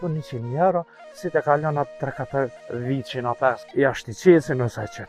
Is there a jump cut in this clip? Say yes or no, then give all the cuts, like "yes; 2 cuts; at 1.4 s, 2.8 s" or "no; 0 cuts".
yes; 2 cuts; at 2.6 s, 3.6 s